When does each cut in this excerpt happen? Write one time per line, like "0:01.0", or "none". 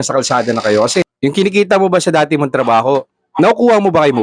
0:01.1